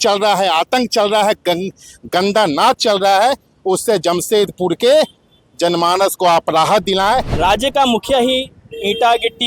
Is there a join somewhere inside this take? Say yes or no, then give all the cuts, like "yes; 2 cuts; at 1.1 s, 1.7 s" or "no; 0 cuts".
yes; 1 cut; at 7.3 s